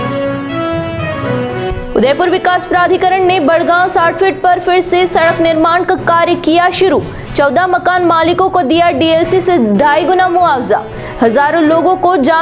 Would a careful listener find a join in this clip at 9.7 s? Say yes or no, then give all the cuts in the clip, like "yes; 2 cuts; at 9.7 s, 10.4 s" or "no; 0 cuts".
no; 1 cut; at 1.6 s